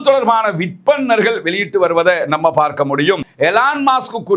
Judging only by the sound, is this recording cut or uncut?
cut